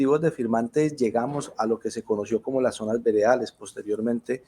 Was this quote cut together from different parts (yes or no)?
no